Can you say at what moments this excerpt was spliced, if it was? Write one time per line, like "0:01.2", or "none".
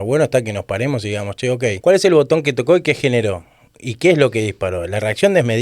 0:01.8